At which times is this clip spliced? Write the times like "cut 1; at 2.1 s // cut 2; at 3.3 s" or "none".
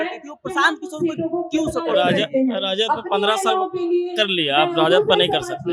none